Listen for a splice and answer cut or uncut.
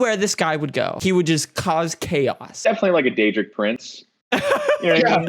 cut